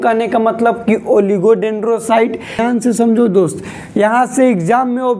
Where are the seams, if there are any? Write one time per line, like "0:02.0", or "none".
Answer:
0:02.6